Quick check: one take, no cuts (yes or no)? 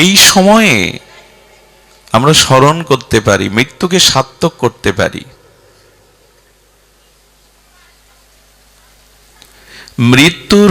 yes